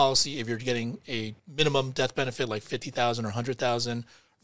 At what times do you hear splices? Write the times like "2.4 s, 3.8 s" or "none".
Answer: 1.4 s